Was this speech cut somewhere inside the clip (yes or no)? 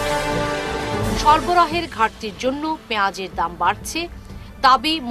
yes